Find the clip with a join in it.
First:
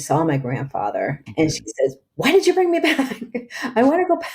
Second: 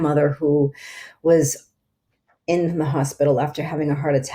first; 1 cut; at 1.2 s

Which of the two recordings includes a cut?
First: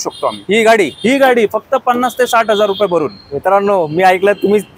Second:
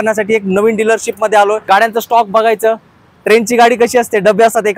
second; 1 cut; at 1.6 s

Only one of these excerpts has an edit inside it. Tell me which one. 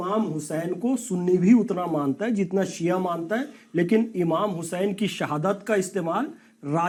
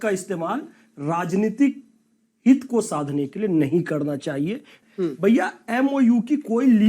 second; 1 cut; at 4.7 s

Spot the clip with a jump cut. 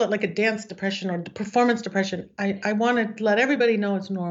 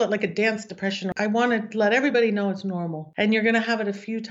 second; 2 cuts; at 1.1 s, 3.0 s

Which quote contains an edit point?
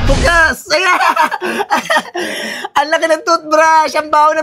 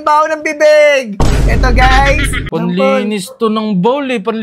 second; 1 cut; at 2.4 s

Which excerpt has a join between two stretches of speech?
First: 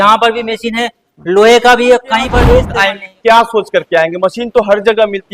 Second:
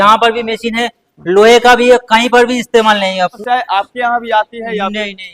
first; 1 cut; at 2.4 s

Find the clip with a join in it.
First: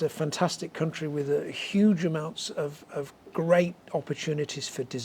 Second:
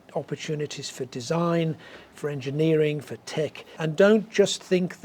second; 1 cut; at 3.8 s

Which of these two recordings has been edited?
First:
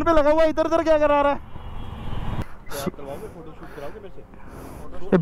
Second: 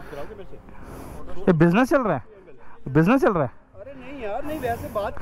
first; 1 cut; at 2.4 s

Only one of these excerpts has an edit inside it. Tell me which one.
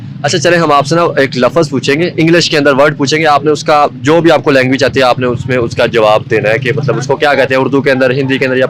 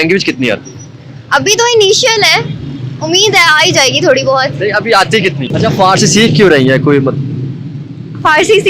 second; 1 cut; at 5.4 s

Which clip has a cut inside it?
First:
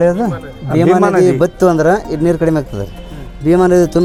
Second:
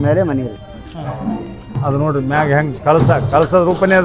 second; 1 cut; at 1.8 s

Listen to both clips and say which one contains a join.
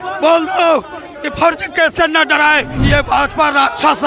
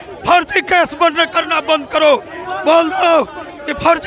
first; 1 cut; at 2.7 s

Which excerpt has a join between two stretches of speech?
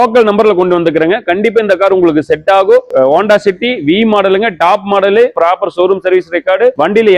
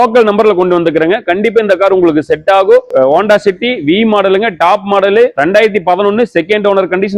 first; 1 cut; at 5.3 s

